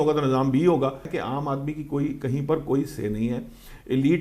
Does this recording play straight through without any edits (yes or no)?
no